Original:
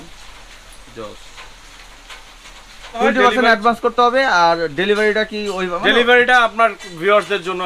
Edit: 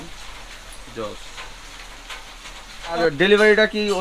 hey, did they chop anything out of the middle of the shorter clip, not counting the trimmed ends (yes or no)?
yes